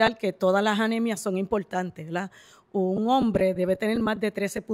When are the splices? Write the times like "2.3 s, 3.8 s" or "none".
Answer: none